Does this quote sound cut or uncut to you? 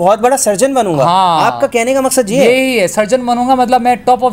uncut